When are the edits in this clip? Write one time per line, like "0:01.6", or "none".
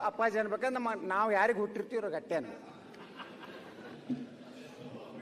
none